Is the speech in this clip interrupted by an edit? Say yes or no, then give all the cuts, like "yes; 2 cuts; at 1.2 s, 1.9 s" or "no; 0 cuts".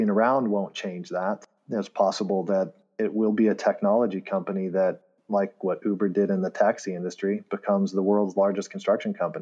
yes; 1 cut; at 1.5 s